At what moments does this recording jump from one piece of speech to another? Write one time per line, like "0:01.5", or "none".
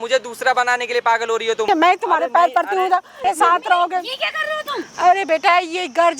0:01.7
0:03.2
0:04.8